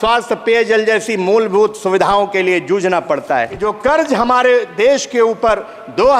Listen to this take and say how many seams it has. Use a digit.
1